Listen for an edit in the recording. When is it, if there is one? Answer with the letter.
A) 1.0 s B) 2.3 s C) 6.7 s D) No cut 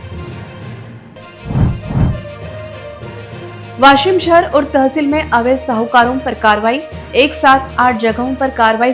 A